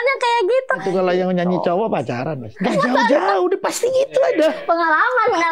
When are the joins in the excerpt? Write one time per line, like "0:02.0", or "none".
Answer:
0:00.8
0:02.4
0:04.6

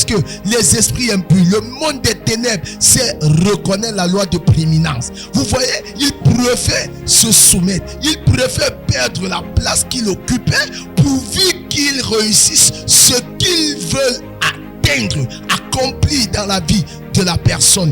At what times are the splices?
none

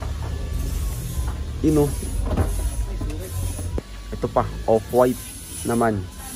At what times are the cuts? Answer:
0:03.7

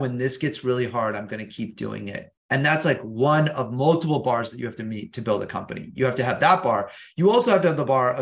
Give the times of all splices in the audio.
0:02.3

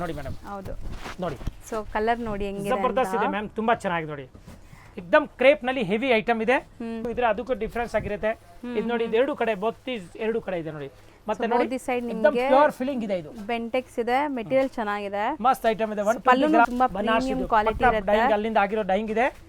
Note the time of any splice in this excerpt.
0:07.0
0:16.7

